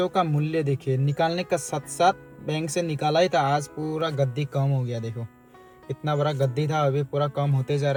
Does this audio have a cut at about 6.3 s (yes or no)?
no